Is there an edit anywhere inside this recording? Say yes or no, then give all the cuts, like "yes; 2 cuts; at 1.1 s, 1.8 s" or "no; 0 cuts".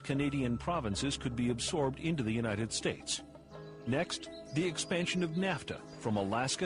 yes; 1 cut; at 1.6 s